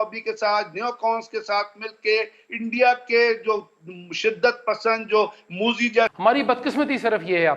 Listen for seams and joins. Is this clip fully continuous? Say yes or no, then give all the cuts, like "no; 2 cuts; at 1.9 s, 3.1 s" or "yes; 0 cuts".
no; 1 cut; at 6.1 s